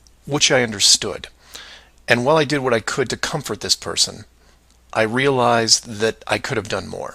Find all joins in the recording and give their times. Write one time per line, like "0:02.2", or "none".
0:02.8